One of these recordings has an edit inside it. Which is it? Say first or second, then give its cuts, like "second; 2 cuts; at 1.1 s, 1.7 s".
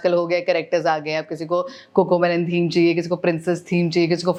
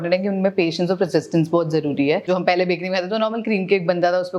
second; 1 cut; at 2.3 s